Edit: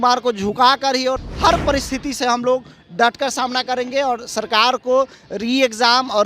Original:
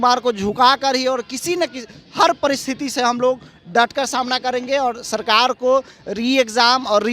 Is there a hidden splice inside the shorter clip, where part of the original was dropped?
yes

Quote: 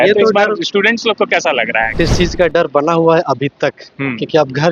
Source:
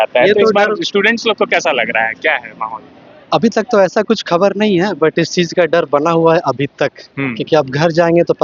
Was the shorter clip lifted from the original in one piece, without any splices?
no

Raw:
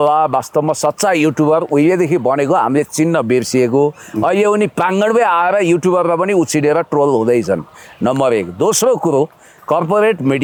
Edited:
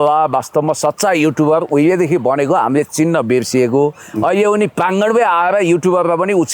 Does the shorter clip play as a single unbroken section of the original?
yes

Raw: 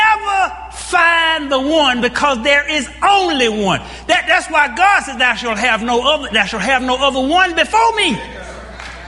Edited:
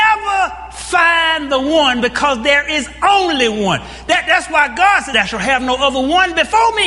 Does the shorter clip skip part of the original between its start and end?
yes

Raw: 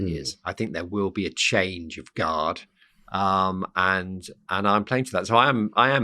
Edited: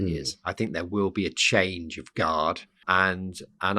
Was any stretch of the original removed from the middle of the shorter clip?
yes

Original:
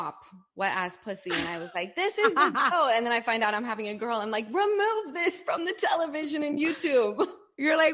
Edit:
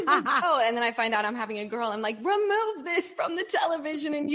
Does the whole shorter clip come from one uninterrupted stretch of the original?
yes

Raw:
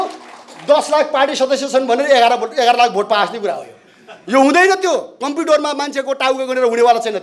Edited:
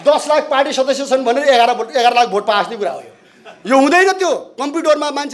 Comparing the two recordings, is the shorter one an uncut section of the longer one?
yes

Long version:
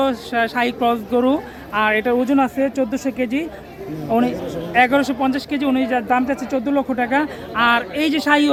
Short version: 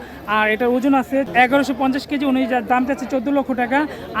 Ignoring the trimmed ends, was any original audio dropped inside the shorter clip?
yes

